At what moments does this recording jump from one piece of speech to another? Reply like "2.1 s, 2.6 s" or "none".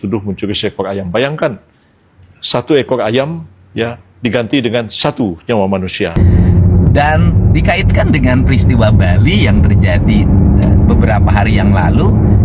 6.1 s